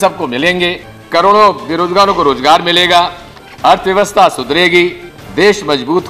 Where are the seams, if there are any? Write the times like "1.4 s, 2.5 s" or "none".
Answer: none